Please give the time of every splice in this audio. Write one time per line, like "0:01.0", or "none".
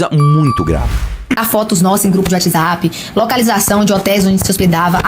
0:01.4